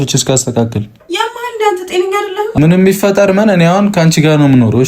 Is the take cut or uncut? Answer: cut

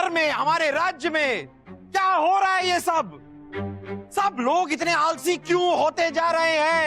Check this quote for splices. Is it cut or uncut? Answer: uncut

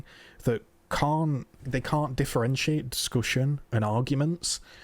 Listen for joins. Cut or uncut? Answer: cut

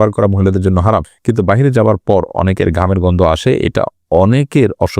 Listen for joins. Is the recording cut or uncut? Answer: cut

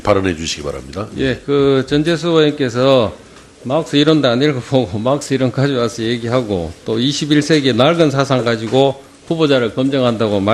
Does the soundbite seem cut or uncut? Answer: uncut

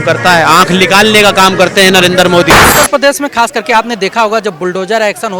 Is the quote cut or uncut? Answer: cut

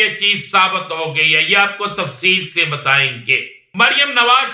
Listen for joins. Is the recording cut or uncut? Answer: cut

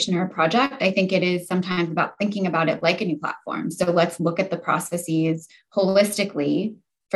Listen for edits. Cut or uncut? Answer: uncut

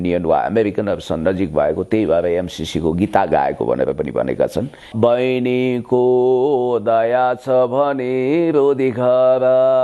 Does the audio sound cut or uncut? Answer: cut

